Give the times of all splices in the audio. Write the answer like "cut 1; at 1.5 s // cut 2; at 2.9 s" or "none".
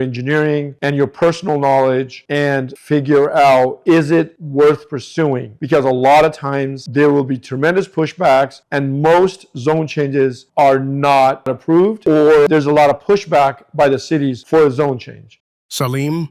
cut 1; at 12.5 s // cut 2; at 15.3 s